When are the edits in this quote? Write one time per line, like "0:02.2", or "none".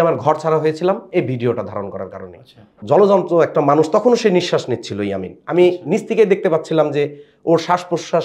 0:02.8